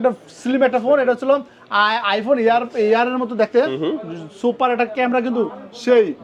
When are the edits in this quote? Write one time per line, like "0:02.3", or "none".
none